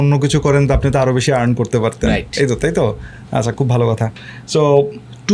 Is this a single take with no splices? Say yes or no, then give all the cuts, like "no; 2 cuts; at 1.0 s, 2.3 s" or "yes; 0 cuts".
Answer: yes; 0 cuts